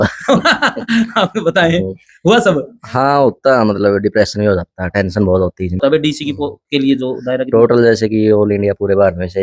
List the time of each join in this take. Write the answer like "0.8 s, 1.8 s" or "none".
5.8 s